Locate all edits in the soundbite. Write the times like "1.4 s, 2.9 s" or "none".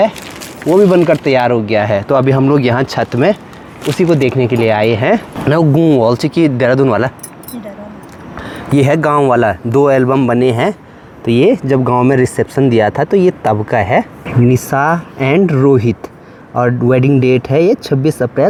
none